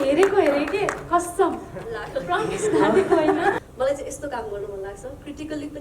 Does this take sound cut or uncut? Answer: cut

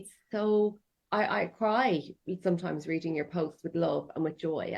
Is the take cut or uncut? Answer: cut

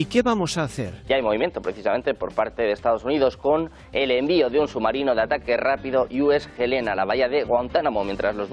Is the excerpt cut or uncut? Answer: cut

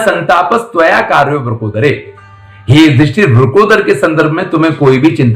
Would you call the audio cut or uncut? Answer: uncut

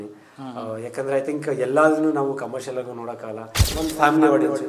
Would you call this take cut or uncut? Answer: cut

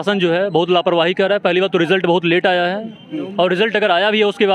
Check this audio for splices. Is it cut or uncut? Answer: uncut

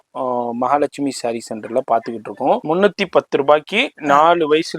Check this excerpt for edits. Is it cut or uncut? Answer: cut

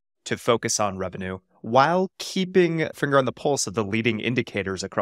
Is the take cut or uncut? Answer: cut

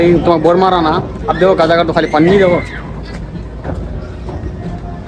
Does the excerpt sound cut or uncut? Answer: uncut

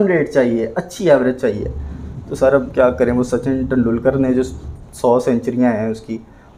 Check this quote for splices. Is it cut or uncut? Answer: uncut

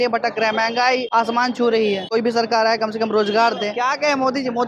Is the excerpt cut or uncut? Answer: cut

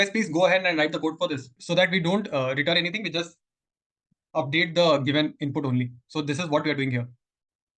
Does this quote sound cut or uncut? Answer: cut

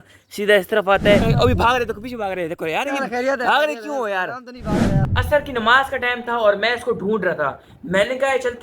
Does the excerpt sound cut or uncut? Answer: cut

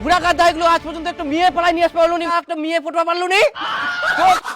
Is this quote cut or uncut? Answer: cut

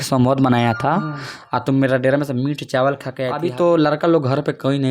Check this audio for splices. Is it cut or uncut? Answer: cut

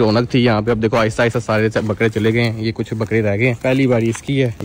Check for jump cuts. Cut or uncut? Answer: uncut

